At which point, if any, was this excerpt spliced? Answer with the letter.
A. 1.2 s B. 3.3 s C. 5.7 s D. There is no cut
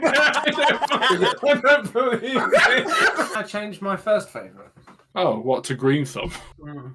B